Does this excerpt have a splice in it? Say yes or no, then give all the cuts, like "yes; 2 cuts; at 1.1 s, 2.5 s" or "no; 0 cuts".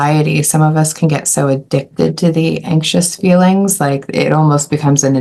no; 0 cuts